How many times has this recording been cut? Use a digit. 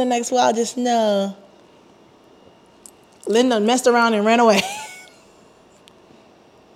0